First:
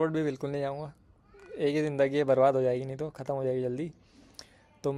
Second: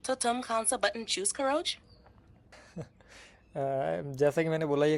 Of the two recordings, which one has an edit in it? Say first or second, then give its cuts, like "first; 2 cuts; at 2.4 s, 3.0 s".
second; 1 cut; at 2.6 s